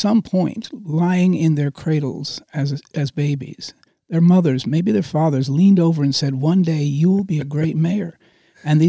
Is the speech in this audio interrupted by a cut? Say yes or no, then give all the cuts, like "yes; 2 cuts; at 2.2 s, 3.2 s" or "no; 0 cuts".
no; 0 cuts